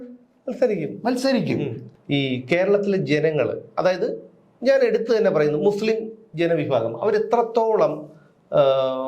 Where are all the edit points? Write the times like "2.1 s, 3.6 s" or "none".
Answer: 1.8 s